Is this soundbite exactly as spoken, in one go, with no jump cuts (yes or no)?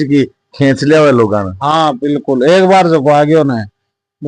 yes